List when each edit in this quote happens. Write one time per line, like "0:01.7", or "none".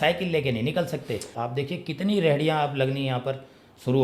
0:01.3